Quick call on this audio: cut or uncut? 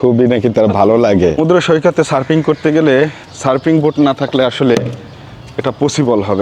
cut